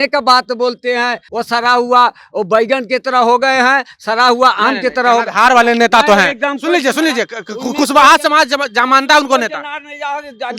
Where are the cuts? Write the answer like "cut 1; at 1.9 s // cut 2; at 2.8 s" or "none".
cut 1; at 1.3 s